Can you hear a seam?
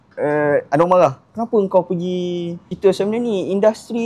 yes; 1 cut; at 2.6 s

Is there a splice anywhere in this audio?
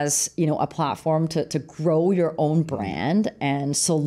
no; 0 cuts

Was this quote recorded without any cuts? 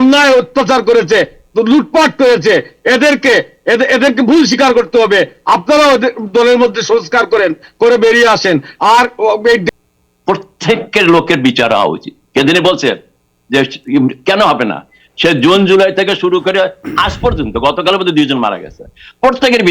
no; 1 cut; at 9.6 s

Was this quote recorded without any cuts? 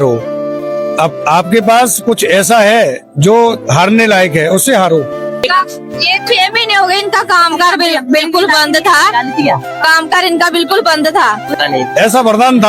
no; 2 cuts; at 5.2 s, 11.5 s

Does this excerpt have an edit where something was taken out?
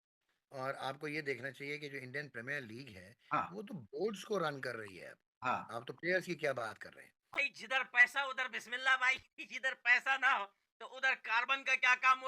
yes; 1 cut; at 7.2 s

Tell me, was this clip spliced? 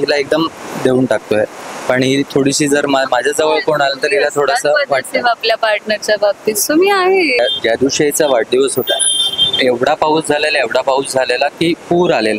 yes; 1 cut; at 7.4 s

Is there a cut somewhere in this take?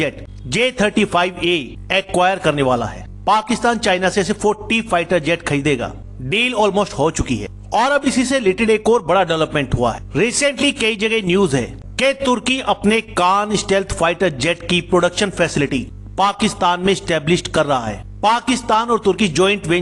no; 0 cuts

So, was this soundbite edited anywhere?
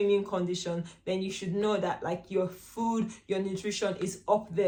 no; 0 cuts

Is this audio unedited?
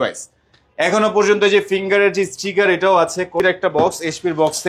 no; 1 cut; at 3.3 s

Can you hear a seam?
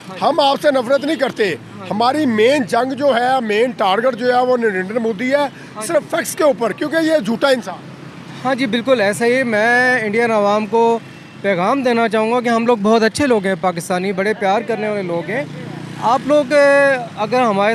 no; 0 cuts

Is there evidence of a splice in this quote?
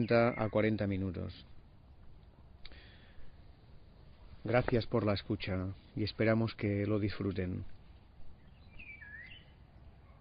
yes; 1 cut; at 5.3 s

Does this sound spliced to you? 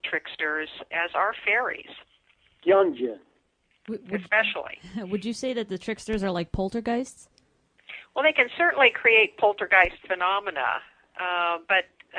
no; 0 cuts

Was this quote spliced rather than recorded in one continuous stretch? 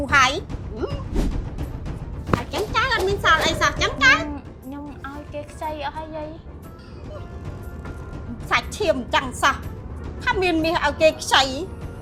no; 0 cuts

